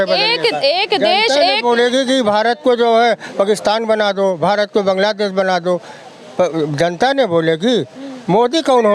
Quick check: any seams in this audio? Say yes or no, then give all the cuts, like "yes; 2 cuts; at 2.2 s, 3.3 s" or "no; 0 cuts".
no; 0 cuts